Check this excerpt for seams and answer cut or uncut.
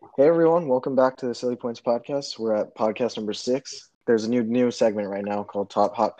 cut